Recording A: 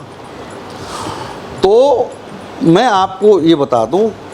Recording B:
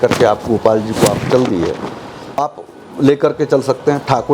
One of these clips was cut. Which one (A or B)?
B